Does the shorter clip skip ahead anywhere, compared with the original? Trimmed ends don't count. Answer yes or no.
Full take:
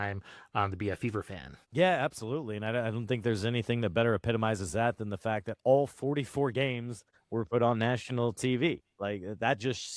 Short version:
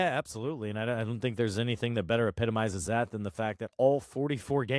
no